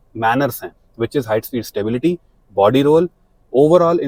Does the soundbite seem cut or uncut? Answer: uncut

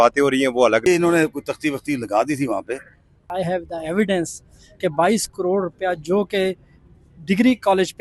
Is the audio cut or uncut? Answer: cut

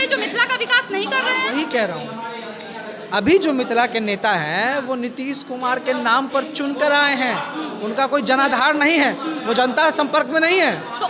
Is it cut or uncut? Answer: uncut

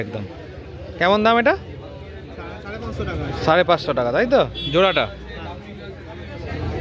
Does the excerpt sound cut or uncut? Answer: uncut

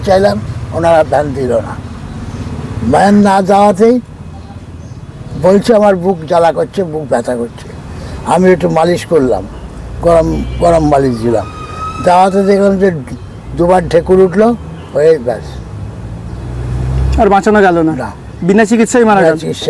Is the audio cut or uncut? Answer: uncut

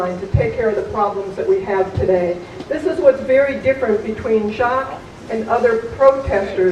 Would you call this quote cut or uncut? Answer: cut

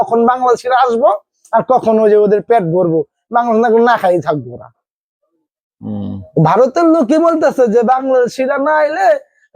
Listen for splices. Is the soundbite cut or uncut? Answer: uncut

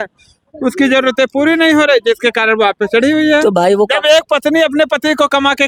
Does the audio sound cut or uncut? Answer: uncut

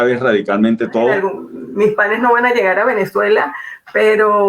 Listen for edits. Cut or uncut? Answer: cut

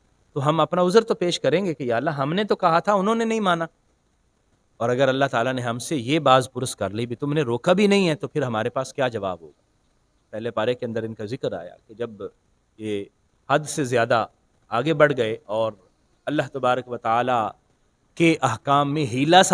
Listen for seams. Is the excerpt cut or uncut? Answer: cut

